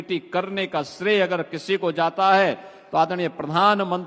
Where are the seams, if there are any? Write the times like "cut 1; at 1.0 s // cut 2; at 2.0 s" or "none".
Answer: none